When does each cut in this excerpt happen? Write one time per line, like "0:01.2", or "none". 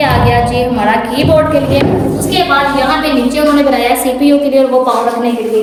none